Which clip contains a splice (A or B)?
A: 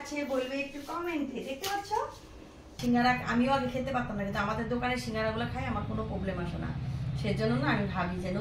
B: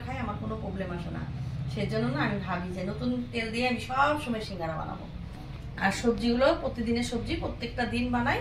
A